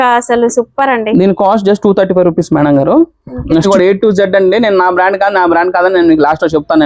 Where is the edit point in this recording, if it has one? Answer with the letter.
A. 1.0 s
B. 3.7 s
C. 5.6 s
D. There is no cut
B